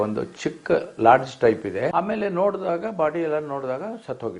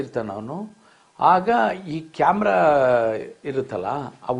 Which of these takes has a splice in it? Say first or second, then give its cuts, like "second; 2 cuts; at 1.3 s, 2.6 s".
first; 1 cut; at 1.9 s